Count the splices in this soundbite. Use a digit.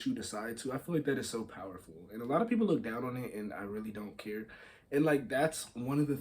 0